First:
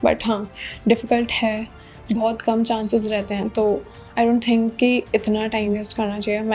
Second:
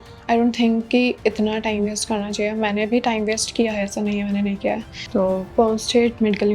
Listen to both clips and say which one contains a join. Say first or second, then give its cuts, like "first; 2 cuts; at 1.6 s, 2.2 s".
second; 1 cut; at 4.9 s